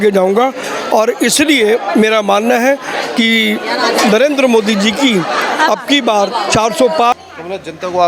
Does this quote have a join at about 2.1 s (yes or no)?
no